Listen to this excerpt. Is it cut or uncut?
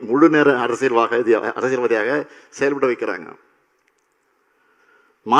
uncut